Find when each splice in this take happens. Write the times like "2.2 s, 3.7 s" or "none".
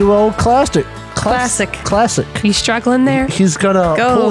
1.0 s